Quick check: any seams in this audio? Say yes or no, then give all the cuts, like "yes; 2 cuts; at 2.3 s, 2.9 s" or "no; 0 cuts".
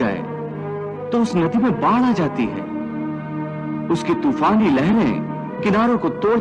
no; 0 cuts